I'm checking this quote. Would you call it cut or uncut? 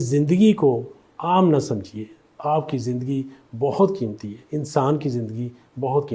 uncut